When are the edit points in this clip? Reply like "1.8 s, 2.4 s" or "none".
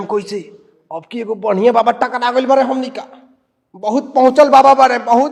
none